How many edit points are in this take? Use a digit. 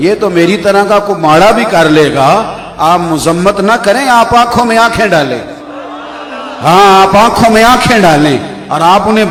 0